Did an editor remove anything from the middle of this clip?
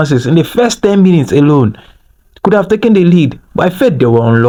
no; 0 cuts

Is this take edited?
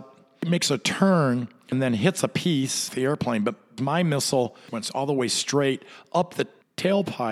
yes; 4 cuts; at 1.7 s, 2.9 s, 3.8 s, 4.7 s

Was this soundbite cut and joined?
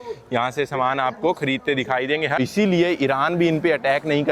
yes; 1 cut; at 2.4 s

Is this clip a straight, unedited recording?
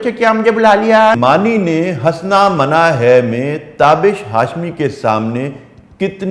no; 1 cut; at 1.2 s

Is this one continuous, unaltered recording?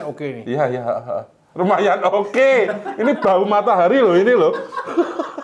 yes; 0 cuts

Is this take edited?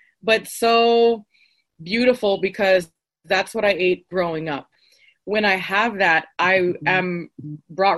yes; 1 cut; at 4.8 s

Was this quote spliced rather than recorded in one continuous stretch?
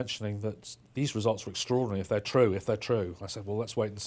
no; 0 cuts

